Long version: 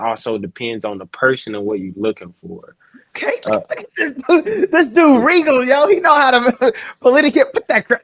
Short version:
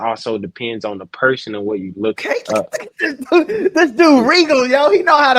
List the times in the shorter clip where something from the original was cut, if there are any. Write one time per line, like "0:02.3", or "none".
0:02.2